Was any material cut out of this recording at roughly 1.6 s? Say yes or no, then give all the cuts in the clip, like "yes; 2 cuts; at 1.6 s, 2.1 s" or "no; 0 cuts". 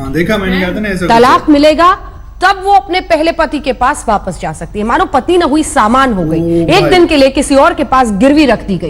no; 0 cuts